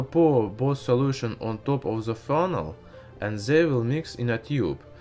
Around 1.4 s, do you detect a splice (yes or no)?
no